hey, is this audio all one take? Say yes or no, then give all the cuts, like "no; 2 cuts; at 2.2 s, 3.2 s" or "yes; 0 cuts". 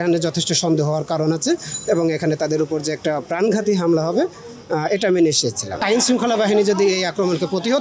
no; 1 cut; at 5.8 s